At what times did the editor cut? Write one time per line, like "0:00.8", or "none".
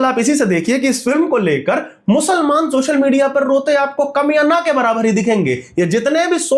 none